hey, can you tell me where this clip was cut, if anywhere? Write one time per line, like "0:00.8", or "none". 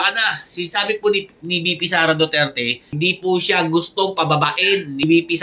0:02.8

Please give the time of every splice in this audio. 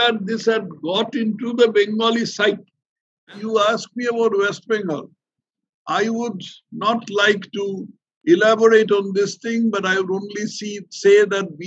0:03.3

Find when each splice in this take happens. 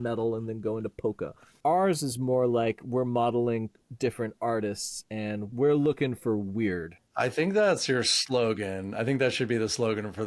0:01.5
0:03.8
0:05.5
0:07.1

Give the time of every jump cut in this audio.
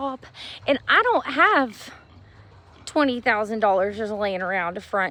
none

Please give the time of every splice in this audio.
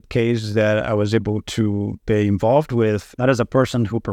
0:03.1

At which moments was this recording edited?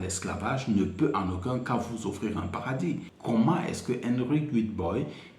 0:03.1

